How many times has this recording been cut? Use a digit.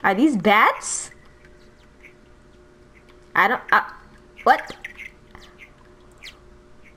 0